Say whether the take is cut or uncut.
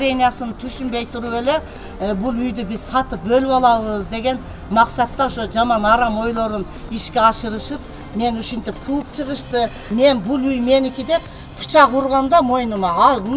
cut